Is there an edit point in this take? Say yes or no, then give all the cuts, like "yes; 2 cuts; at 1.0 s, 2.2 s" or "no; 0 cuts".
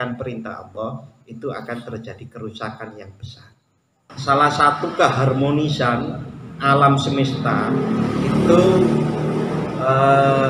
yes; 1 cut; at 4.1 s